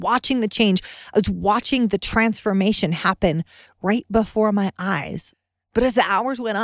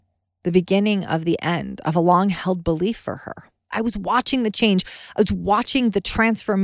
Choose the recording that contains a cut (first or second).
first